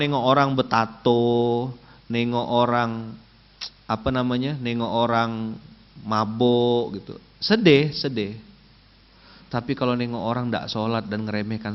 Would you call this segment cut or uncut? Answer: uncut